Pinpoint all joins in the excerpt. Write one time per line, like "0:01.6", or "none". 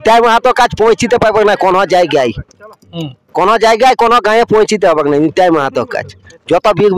none